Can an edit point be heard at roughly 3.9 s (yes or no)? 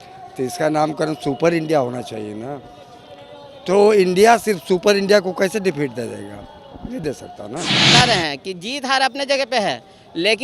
no